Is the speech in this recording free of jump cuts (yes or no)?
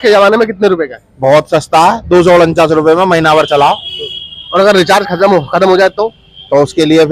yes